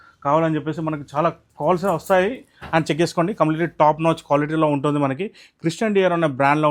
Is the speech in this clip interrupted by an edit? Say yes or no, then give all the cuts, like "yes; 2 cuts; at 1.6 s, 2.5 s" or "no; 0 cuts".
no; 0 cuts